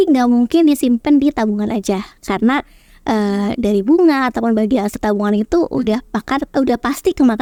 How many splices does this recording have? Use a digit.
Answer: 0